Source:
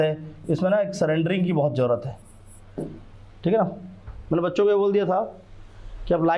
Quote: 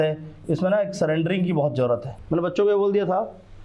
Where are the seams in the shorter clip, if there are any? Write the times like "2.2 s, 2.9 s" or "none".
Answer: 2.1 s